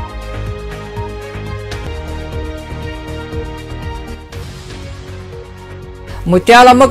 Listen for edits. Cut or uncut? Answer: uncut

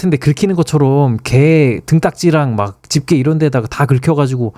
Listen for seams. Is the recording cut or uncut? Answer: uncut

